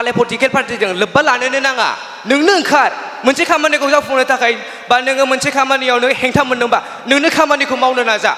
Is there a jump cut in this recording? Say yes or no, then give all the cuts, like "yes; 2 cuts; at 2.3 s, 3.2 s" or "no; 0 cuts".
no; 0 cuts